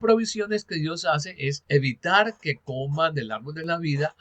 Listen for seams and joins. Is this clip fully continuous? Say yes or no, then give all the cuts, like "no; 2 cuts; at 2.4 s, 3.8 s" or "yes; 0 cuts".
no; 1 cut; at 1.6 s